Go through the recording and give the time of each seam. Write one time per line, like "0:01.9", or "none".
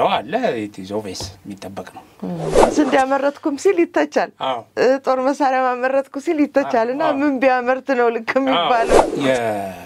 0:02.6
0:09.0